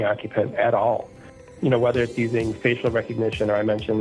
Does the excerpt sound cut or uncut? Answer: cut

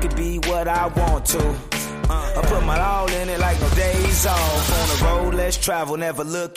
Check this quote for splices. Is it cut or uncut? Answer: uncut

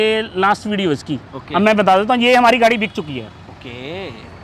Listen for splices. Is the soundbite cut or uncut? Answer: uncut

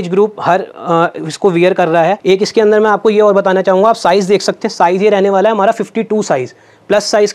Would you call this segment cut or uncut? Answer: cut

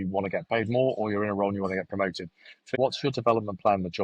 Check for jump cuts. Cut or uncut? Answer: cut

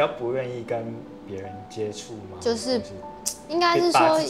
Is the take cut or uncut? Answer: uncut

